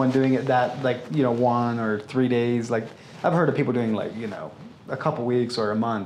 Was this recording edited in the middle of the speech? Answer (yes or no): no